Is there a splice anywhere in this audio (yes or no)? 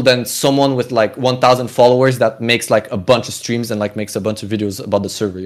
no